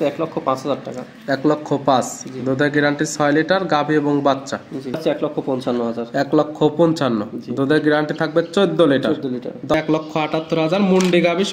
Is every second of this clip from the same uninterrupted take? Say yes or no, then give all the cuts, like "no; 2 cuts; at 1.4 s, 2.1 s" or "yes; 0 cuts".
no; 2 cuts; at 5.0 s, 9.7 s